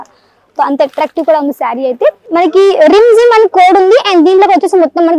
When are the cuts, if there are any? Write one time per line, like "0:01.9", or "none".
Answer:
0:02.2